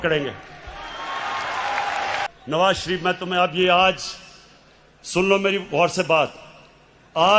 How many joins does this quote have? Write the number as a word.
one